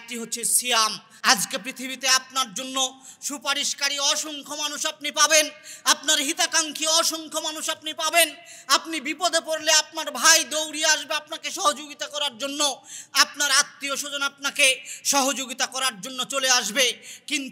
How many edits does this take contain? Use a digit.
1